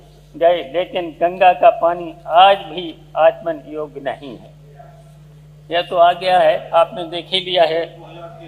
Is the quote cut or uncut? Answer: uncut